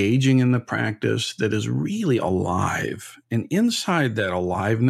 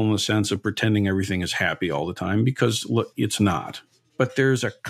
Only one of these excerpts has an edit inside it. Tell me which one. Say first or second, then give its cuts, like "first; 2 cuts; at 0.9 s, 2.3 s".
second; 1 cut; at 3.8 s